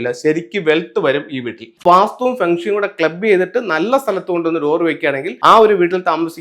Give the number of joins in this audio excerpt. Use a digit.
2